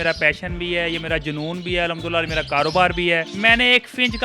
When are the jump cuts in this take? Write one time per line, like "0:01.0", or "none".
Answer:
0:03.3